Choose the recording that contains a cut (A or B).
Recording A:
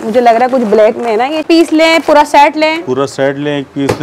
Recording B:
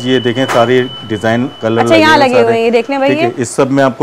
A